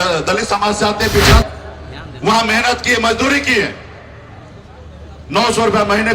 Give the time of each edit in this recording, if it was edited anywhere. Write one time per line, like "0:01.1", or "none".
0:01.4